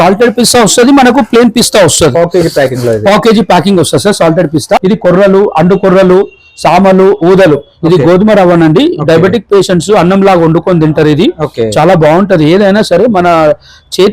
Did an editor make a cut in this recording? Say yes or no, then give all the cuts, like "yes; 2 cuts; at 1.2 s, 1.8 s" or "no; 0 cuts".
yes; 1 cut; at 4.8 s